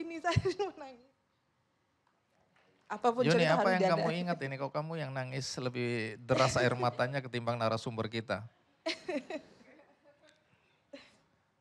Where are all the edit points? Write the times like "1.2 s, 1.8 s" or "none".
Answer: 2.3 s

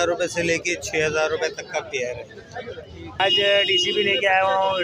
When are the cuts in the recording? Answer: 3.2 s

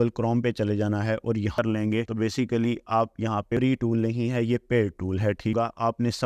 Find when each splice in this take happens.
1.6 s, 3.6 s, 5.5 s

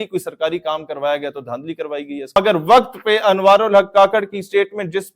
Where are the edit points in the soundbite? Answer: 2.4 s

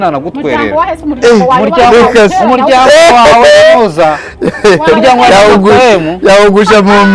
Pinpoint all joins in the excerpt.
none

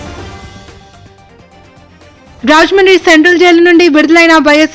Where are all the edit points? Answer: 1.1 s

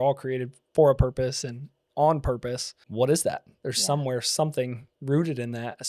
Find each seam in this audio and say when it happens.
2.8 s

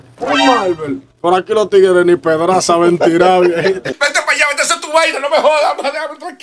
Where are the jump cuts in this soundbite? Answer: 4.0 s

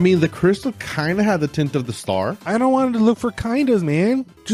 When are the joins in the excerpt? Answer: none

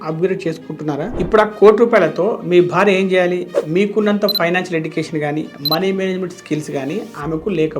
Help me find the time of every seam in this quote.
1.1 s

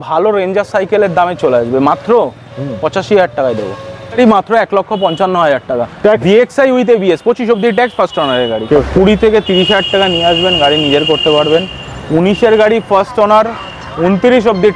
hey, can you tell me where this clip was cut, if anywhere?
4.2 s, 8.6 s

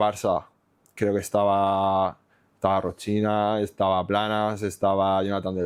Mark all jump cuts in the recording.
none

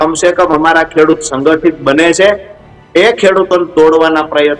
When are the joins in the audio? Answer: none

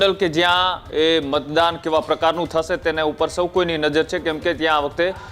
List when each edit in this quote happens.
none

